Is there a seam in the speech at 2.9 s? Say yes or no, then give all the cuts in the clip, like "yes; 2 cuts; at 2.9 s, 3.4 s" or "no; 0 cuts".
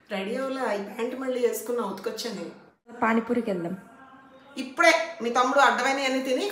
yes; 1 cut; at 2.9 s